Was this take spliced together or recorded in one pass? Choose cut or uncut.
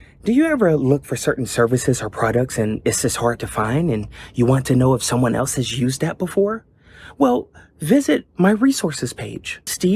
uncut